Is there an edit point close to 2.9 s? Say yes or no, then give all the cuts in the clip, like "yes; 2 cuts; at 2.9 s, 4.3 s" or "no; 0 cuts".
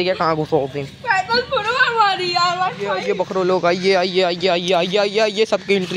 yes; 1 cut; at 2.9 s